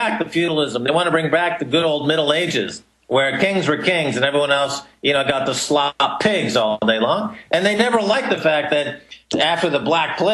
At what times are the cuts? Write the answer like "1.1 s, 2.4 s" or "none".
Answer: 5.6 s